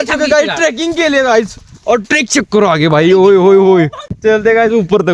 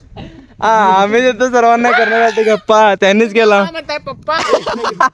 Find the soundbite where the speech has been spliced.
first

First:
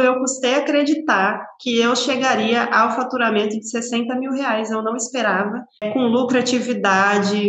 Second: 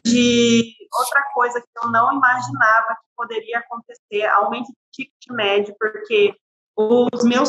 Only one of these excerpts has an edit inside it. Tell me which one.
first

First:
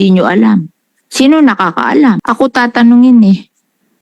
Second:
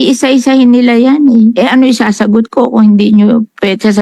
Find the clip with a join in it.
first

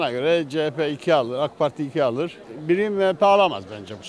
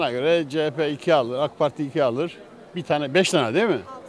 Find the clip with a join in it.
first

